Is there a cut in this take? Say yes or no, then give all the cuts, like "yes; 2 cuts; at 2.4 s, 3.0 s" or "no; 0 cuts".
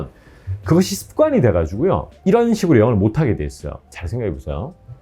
yes; 1 cut; at 3.8 s